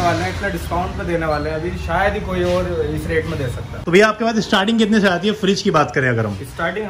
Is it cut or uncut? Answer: cut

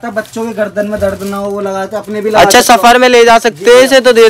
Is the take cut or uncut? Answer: uncut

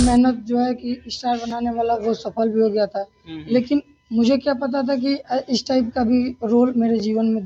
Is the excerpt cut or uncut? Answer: uncut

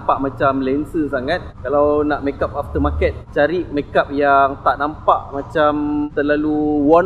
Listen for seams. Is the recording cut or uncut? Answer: uncut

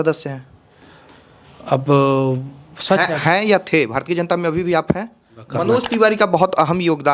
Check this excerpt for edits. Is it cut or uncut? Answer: cut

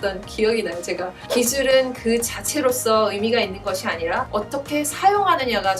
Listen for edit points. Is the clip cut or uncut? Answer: cut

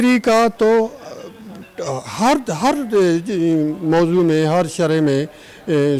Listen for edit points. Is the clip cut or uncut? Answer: uncut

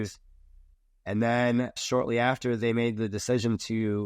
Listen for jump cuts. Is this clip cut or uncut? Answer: cut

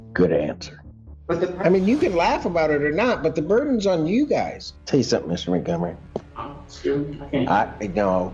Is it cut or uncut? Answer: cut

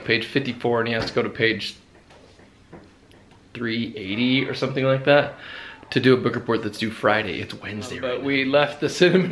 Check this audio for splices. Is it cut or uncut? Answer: cut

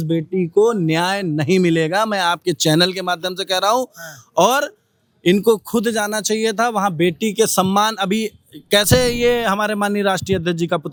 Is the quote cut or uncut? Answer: uncut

